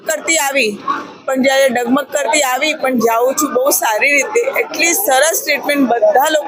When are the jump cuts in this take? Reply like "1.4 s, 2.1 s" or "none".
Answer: none